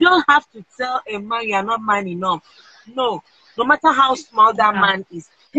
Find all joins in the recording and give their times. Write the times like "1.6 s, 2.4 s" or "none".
none